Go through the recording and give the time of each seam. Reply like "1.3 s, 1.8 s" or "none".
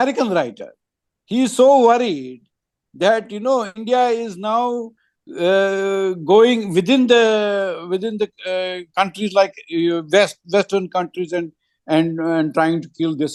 none